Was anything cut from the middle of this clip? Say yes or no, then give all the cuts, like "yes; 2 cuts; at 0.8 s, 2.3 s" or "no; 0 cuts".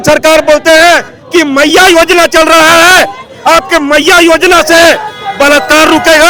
no; 0 cuts